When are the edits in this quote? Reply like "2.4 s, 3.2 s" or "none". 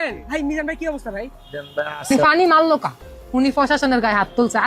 1.9 s